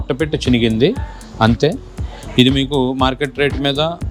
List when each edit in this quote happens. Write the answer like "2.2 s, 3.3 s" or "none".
none